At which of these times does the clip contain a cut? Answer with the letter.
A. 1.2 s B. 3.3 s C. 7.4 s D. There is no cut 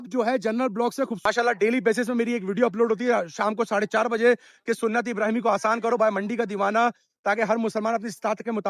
A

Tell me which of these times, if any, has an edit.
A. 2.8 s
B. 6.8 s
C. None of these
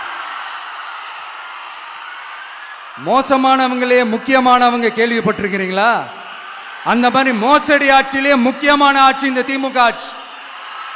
A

